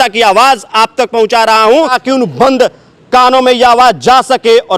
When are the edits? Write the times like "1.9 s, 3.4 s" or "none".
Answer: 2.0 s

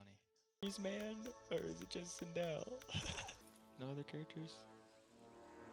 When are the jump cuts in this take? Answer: 3.5 s

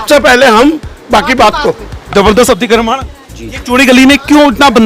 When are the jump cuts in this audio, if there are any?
2.1 s

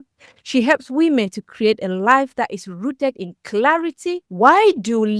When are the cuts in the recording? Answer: 4.3 s

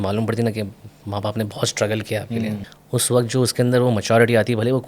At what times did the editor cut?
2.7 s

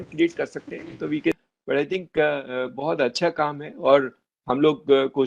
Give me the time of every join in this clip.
1.4 s

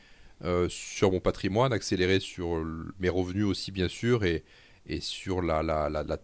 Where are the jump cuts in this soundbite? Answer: none

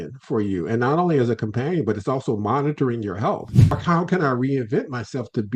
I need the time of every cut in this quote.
3.8 s

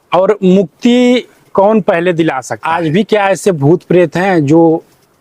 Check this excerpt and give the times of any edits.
2.5 s

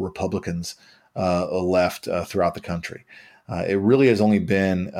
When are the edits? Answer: none

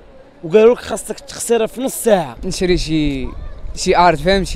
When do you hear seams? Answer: 2.4 s

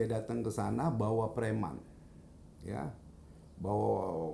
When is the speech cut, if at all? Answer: none

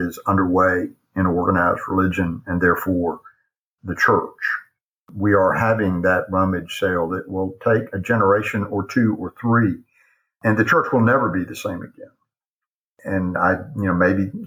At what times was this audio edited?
10.4 s

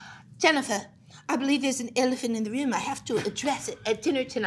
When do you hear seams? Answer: none

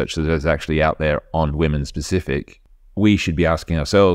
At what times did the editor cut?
2.6 s

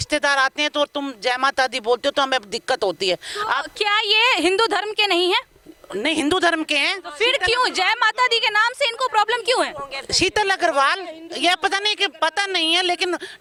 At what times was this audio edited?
none

